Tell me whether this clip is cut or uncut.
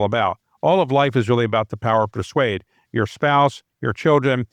uncut